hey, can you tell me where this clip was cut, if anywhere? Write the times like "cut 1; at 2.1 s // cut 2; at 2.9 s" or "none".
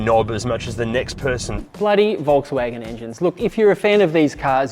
cut 1; at 1.6 s